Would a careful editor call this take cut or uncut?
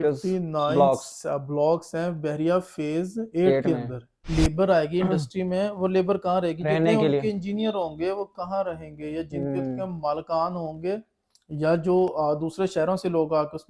cut